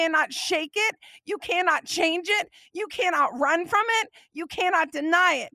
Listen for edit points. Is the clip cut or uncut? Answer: uncut